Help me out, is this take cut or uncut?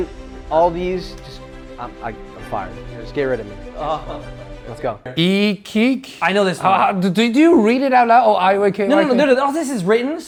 uncut